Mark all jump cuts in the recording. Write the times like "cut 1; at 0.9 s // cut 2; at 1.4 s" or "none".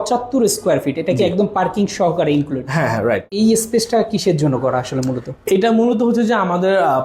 cut 1; at 3.3 s